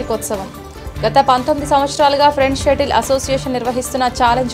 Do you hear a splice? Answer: no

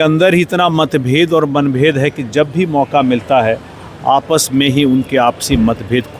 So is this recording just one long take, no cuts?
yes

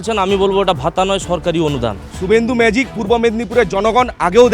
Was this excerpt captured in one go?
no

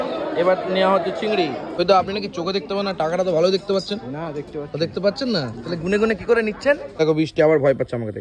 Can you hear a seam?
yes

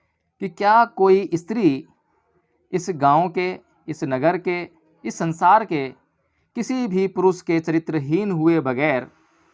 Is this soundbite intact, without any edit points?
yes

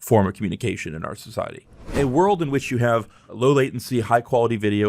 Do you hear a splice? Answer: yes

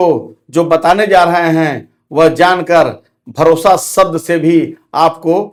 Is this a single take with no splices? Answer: yes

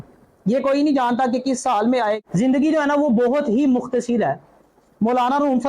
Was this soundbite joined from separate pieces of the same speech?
yes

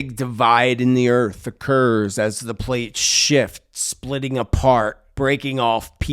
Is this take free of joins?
no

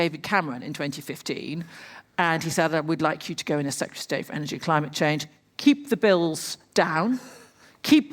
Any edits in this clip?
yes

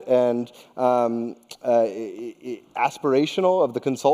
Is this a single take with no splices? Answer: no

